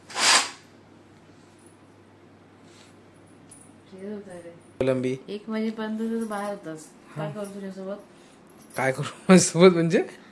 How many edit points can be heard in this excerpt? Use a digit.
1